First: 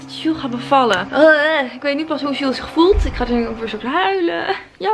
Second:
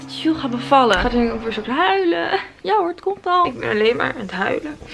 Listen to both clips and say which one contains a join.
second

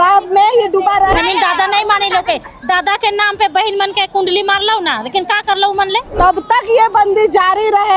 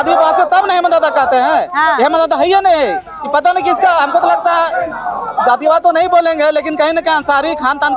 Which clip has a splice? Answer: first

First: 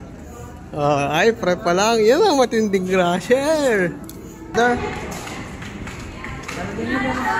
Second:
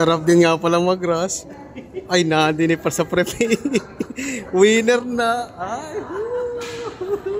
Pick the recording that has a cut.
first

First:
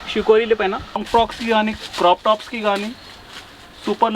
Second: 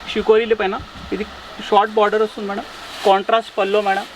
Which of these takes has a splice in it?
first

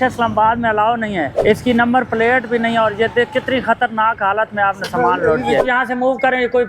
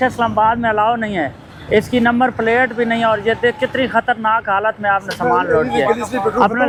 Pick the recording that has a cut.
first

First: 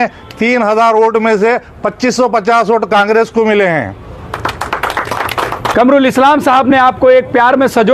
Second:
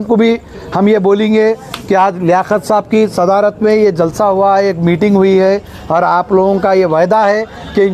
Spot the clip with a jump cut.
first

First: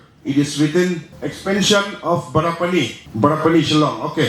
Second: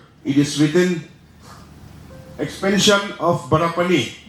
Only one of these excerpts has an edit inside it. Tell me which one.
first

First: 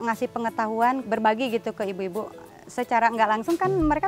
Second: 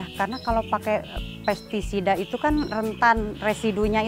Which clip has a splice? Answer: first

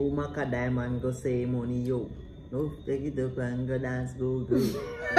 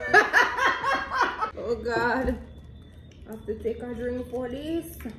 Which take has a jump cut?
second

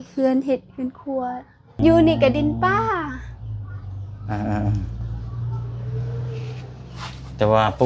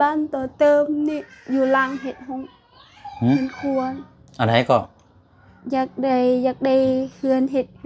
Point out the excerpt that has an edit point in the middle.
first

